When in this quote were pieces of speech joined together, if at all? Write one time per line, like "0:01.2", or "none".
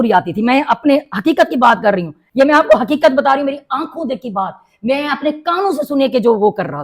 0:02.2